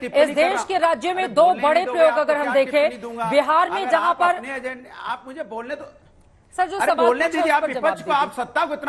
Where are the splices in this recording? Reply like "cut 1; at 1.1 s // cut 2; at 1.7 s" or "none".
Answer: none